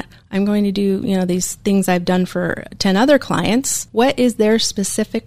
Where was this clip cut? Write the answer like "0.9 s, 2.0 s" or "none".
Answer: 3.8 s